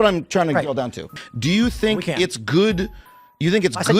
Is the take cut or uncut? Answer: cut